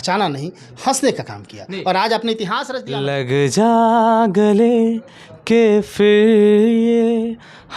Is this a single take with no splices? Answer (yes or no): no